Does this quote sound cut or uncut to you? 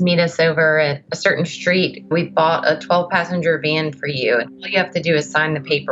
uncut